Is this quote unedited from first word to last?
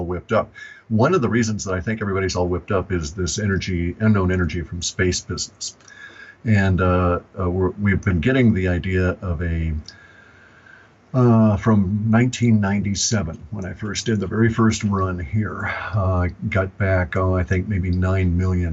no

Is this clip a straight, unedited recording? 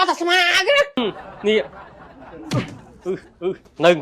no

